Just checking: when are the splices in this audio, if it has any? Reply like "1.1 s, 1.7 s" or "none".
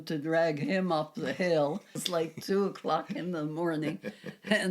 2.0 s